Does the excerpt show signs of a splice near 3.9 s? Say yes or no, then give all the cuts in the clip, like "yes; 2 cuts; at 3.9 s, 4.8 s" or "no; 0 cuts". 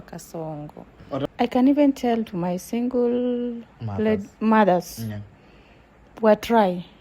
no; 1 cut; at 1.2 s